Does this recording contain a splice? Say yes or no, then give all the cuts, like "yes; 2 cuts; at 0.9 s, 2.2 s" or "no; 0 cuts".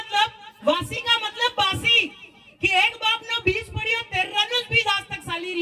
no; 0 cuts